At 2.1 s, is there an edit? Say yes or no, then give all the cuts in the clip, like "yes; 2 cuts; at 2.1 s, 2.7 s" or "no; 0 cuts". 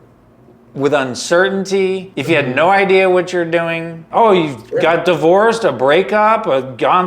yes; 2 cuts; at 2.1 s, 4.1 s